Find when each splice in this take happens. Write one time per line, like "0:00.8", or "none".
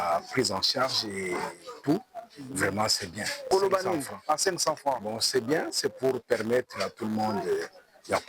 0:03.5